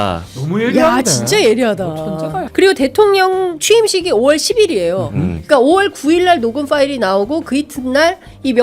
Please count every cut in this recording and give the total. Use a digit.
1